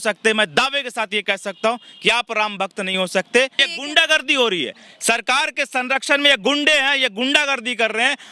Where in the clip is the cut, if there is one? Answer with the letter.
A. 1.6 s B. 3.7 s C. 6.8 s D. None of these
B